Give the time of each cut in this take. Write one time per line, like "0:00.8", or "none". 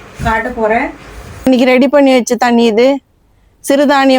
0:01.5